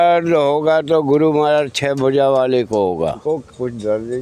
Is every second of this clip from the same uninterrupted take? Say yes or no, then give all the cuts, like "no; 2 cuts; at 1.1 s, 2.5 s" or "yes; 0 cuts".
no; 1 cut; at 3.2 s